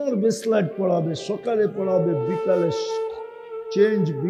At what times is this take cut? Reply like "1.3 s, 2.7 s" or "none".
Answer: none